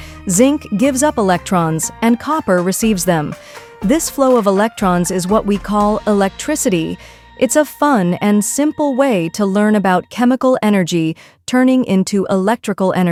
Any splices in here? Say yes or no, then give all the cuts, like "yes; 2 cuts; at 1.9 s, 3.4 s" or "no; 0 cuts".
no; 0 cuts